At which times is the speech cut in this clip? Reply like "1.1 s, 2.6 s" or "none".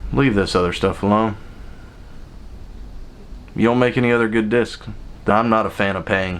5.3 s